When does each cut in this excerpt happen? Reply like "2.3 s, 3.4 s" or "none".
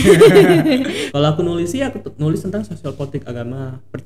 1.0 s